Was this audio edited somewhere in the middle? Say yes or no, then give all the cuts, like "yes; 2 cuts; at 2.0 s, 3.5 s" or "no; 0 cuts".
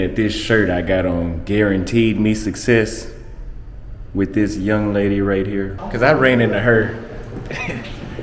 yes; 1 cut; at 5.8 s